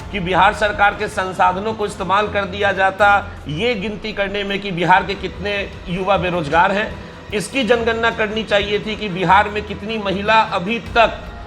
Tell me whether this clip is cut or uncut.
uncut